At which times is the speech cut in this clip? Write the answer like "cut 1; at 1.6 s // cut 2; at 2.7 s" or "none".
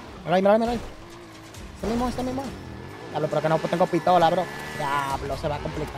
none